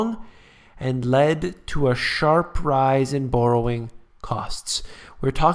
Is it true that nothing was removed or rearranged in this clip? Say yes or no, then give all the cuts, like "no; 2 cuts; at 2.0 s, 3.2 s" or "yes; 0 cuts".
no; 1 cut; at 2.4 s